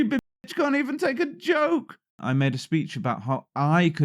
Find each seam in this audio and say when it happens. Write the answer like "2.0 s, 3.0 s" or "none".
2.2 s